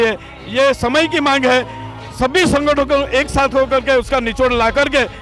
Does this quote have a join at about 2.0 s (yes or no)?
no